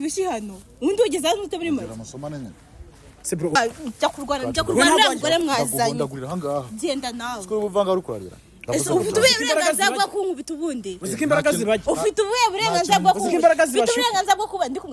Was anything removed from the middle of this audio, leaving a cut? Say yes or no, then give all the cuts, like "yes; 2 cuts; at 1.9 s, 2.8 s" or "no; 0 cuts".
yes; 1 cut; at 3.6 s